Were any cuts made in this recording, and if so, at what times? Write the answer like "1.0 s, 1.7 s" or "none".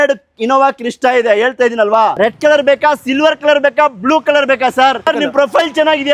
2.1 s, 5.1 s